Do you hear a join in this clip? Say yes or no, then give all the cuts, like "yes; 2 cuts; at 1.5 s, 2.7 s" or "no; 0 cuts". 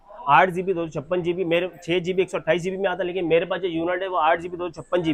no; 0 cuts